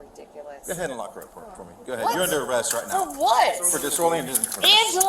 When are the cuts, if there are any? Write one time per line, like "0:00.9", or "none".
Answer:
0:01.7